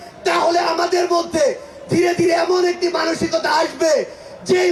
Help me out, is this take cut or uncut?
uncut